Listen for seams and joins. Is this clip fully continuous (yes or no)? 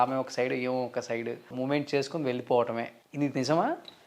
no